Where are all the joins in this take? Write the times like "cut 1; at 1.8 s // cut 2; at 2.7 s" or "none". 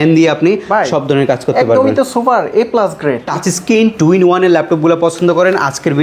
cut 1; at 3.2 s